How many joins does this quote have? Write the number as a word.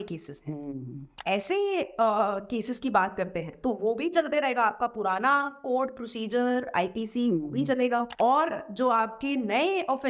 two